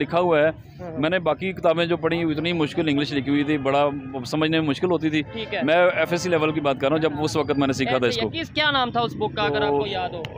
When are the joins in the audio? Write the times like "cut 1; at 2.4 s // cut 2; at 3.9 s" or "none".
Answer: none